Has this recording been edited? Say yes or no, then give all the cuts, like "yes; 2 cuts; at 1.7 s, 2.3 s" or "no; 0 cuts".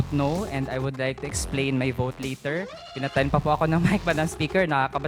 no; 0 cuts